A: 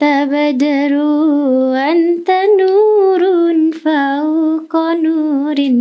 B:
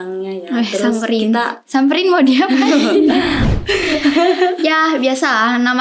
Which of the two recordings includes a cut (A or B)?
B